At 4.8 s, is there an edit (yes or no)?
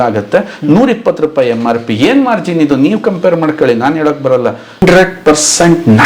yes